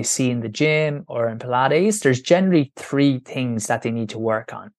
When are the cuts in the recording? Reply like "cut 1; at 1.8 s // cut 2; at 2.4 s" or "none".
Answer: none